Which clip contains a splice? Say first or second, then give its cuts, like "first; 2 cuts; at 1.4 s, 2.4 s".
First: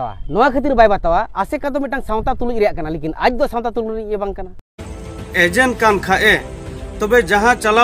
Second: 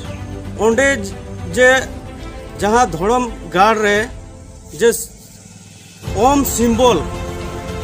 first; 1 cut; at 4.9 s